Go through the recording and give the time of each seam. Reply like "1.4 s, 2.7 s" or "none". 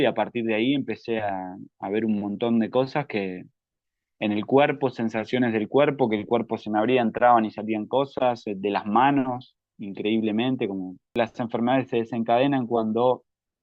11.1 s